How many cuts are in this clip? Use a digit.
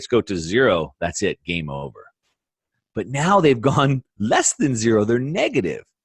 0